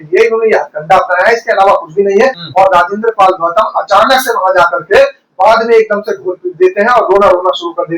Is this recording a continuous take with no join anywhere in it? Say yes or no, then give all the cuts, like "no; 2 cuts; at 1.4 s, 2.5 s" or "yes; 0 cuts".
no; 1 cut; at 2.4 s